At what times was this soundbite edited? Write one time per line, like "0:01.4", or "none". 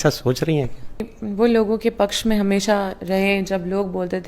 0:01.2